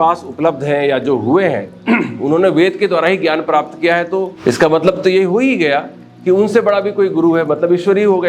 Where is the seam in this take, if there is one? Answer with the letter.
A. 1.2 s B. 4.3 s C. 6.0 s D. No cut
B